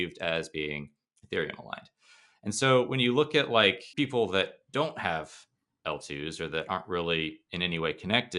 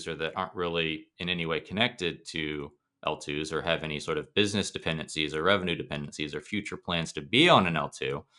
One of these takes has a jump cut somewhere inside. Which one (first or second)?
first